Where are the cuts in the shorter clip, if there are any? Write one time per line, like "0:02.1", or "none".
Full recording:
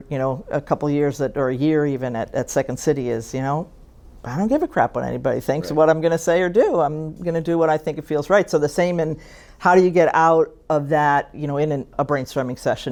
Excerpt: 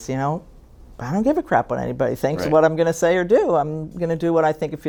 none